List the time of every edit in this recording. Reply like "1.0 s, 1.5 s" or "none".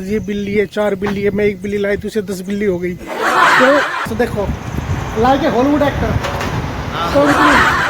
4.1 s